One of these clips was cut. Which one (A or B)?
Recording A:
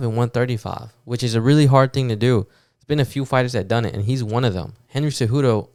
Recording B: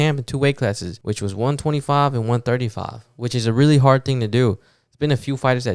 B